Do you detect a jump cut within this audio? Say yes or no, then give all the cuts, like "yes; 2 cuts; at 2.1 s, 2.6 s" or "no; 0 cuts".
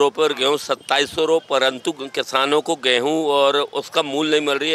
no; 0 cuts